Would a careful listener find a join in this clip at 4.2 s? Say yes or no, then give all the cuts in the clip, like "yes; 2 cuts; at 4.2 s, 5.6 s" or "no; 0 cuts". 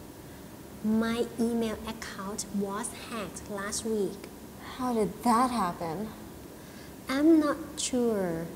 yes; 1 cut; at 4.2 s